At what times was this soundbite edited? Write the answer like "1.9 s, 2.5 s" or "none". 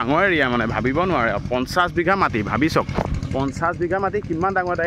none

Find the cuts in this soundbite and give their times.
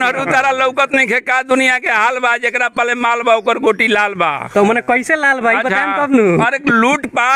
none

